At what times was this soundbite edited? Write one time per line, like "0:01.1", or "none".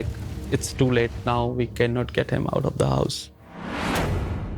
0:03.5